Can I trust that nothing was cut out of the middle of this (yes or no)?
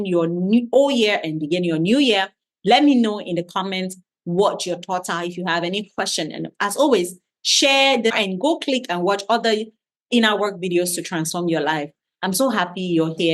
no